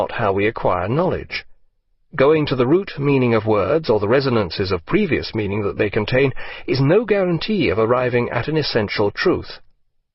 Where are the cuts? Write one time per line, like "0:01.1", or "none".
0:03.0